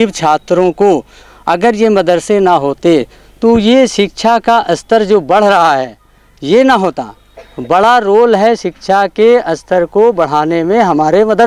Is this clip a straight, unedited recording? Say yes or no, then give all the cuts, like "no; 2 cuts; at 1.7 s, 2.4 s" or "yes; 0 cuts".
yes; 0 cuts